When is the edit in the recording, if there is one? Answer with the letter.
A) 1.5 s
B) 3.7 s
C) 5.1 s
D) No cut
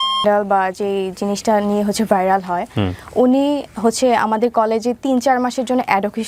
D